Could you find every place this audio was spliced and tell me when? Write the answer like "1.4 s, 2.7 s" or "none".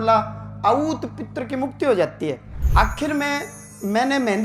2.5 s